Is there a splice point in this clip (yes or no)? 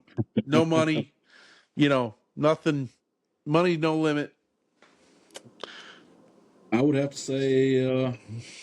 no